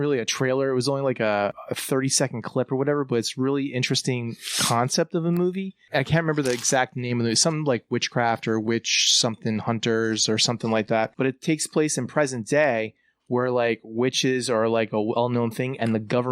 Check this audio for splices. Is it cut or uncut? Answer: cut